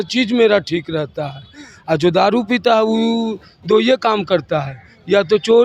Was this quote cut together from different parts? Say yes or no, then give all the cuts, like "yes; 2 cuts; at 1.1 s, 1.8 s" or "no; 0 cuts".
no; 0 cuts